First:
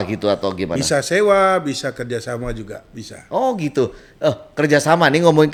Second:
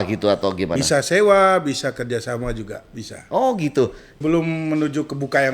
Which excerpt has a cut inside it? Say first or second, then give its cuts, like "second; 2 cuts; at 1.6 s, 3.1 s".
second; 1 cut; at 4.1 s